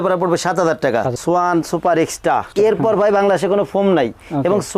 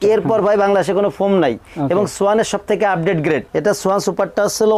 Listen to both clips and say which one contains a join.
first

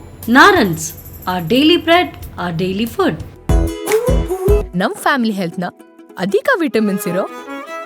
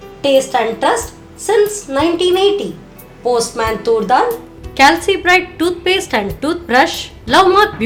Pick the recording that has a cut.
first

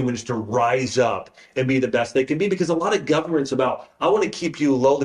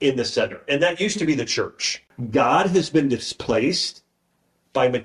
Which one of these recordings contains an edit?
second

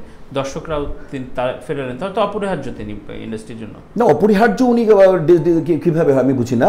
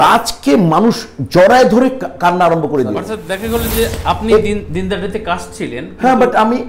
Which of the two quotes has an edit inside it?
second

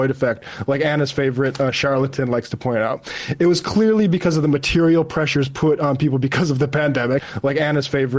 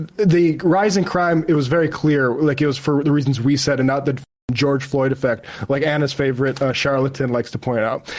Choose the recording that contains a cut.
first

